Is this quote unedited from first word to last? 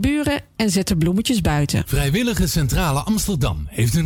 no; 1 cut; at 1.9 s

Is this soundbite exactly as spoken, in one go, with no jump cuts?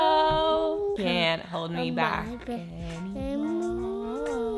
no; 1 cut; at 1.0 s

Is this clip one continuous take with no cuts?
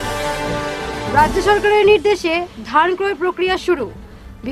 no; 1 cut; at 1.0 s

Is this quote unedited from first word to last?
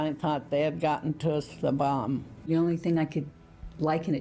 no; 1 cut; at 2.5 s

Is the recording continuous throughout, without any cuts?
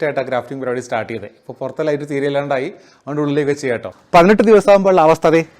no; 1 cut; at 3.9 s

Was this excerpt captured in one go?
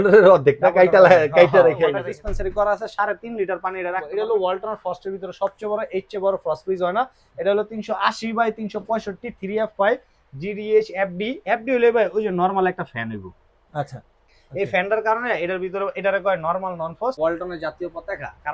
no; 3 cuts; at 2.0 s, 4.0 s, 17.2 s

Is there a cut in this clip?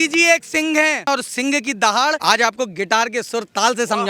yes; 2 cuts; at 1.1 s, 2.2 s

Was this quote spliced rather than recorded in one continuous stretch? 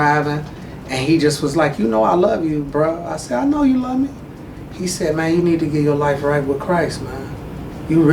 no; 0 cuts

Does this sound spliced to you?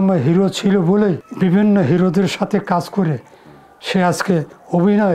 yes; 1 cut; at 1.3 s

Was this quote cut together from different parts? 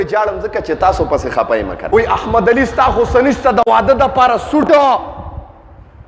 yes; 1 cut; at 1.8 s

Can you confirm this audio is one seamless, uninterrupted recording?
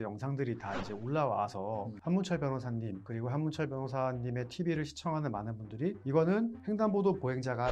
no; 4 cuts; at 1.9 s, 3.0 s, 6.0 s, 6.6 s

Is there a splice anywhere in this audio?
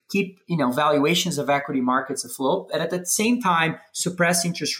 no; 0 cuts

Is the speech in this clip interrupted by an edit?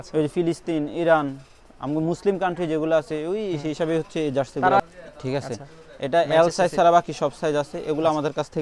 yes; 1 cut; at 4.8 s

